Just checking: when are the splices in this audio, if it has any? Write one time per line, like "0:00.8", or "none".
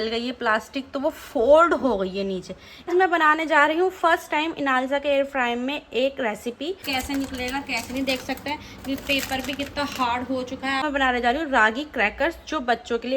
0:02.9
0:06.8
0:10.8

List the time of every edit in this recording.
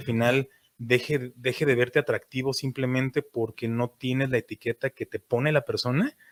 none

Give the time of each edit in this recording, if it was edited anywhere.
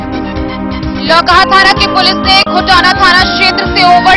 0:01.0

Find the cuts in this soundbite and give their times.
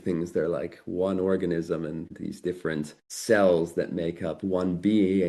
0:02.1
0:03.1

